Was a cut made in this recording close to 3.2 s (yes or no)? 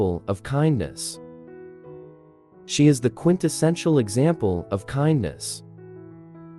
no